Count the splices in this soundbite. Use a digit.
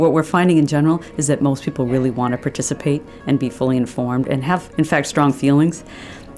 0